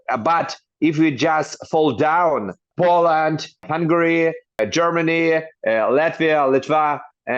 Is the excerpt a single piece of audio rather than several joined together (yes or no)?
no